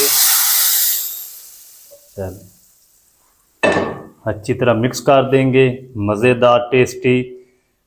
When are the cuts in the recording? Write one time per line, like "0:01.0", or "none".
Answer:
none